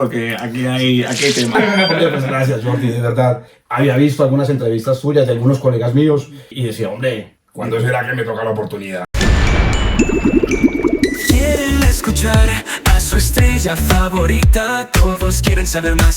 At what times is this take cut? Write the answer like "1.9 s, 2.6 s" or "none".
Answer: 1.5 s, 3.6 s, 6.5 s, 7.4 s, 9.2 s